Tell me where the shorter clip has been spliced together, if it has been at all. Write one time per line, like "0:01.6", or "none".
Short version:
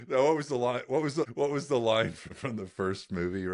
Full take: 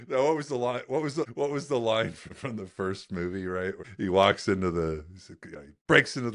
none